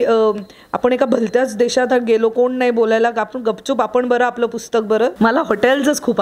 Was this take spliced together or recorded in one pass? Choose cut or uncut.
cut